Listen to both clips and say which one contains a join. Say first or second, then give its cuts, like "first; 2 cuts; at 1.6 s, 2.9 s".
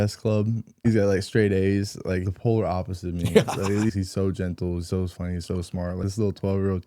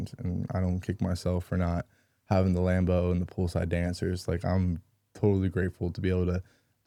first; 4 cuts; at 0.8 s, 2.2 s, 3.9 s, 6.0 s